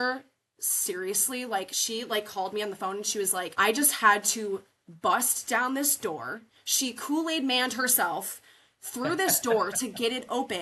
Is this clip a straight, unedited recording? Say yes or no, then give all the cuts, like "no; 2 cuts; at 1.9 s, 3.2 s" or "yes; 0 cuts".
no; 1 cut; at 3.5 s